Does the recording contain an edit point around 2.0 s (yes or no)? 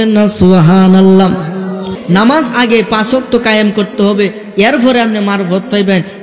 yes